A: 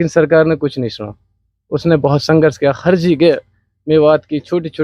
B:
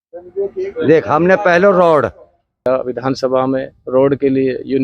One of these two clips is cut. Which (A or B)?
B